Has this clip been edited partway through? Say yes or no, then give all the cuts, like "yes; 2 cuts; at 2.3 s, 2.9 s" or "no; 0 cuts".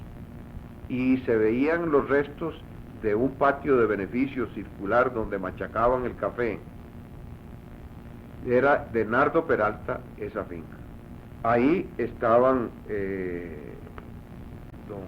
no; 0 cuts